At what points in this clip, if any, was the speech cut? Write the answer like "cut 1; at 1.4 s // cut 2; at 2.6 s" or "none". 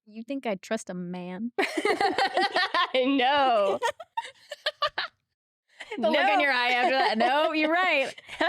none